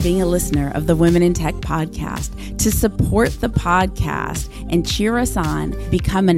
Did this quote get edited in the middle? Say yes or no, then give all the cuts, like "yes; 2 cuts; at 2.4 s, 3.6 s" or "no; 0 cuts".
no; 0 cuts